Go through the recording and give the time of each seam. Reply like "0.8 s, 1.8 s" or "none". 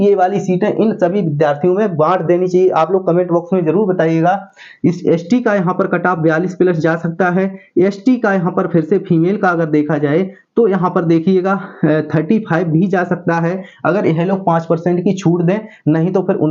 none